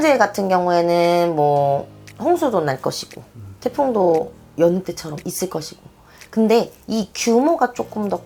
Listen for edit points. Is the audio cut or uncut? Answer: uncut